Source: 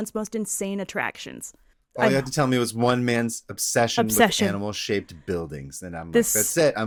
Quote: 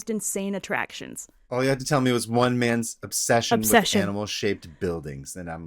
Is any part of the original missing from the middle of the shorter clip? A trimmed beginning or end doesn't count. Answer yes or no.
yes